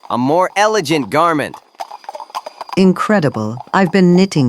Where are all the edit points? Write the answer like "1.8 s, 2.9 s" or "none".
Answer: 2.6 s